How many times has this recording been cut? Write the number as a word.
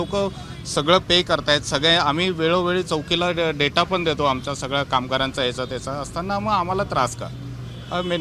zero